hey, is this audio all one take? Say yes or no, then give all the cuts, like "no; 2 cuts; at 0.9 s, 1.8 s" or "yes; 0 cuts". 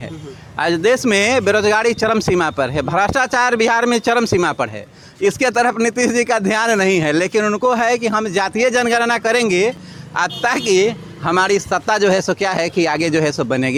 yes; 0 cuts